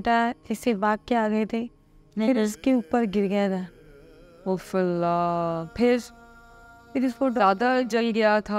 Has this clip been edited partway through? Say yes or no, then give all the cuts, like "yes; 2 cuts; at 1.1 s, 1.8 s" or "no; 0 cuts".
no; 0 cuts